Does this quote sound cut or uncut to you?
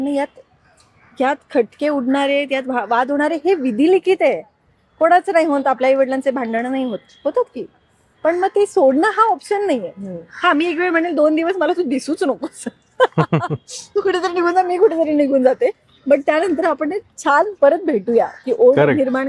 uncut